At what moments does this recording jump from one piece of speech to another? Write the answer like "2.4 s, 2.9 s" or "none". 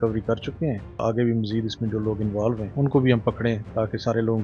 1.0 s, 2.7 s